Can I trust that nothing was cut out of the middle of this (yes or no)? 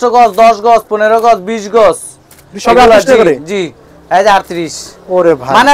yes